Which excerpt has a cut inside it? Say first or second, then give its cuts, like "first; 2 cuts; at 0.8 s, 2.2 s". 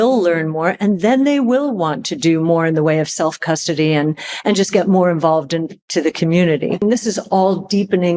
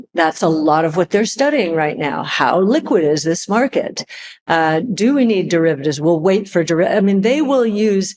first; 1 cut; at 6.8 s